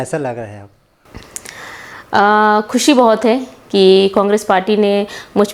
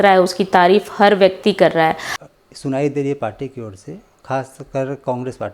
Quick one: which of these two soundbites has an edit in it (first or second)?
second